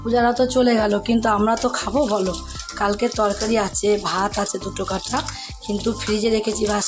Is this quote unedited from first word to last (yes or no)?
yes